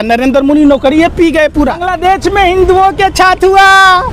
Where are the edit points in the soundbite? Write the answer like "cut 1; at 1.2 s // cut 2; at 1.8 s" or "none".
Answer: cut 1; at 1.9 s